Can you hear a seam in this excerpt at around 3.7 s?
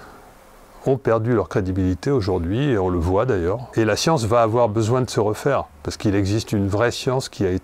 yes; 1 cut; at 3.7 s

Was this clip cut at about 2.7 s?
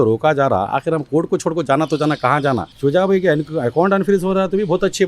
yes; 1 cut; at 2.7 s

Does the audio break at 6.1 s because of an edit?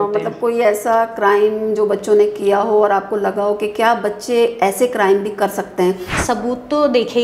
yes; 1 cut; at 6.1 s

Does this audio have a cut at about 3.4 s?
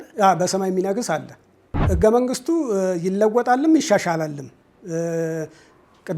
no; 1 cut; at 1.8 s

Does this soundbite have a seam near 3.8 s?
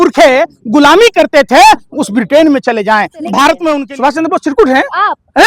yes; 1 cut; at 3.8 s

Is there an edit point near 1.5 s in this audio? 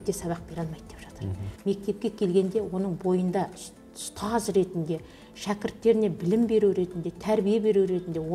yes; 1 cut; at 1.5 s

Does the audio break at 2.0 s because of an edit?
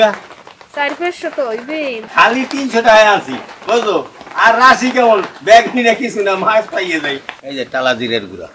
yes; 2 cuts; at 2.0 s, 7.3 s

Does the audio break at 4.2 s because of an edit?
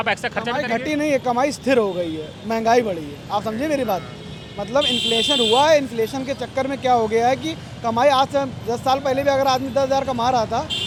no; 0 cuts

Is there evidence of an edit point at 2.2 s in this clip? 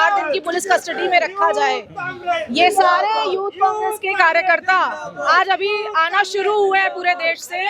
no; 0 cuts

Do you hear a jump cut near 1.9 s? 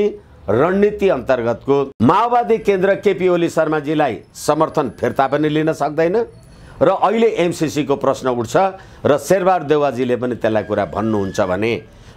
yes; 1 cut; at 1.9 s

